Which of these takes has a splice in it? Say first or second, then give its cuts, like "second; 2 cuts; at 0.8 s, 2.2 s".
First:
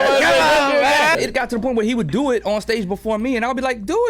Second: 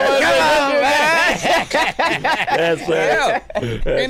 first; 1 cut; at 1.2 s